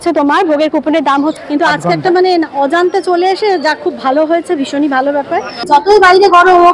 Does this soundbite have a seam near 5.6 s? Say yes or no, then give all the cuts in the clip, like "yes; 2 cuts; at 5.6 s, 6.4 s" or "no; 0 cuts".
yes; 2 cuts; at 1.3 s, 5.6 s